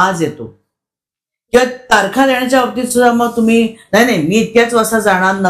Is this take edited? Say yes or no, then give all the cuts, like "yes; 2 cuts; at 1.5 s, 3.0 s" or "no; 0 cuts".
no; 0 cuts